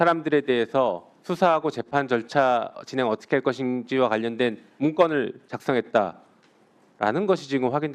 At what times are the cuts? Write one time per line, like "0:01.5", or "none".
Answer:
none